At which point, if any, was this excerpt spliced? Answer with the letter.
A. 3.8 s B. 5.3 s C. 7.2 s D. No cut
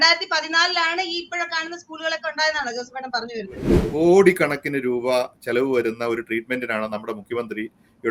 A